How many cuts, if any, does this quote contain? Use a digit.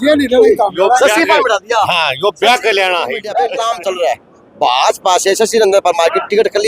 1